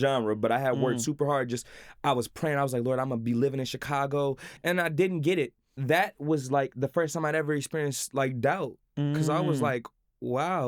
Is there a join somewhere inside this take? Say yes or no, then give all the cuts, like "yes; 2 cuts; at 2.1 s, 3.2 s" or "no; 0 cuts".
yes; 2 cuts; at 4.5 s, 5.8 s